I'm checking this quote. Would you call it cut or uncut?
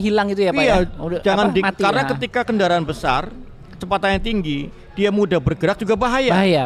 uncut